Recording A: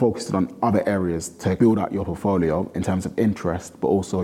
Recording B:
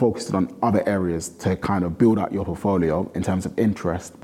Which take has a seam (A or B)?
A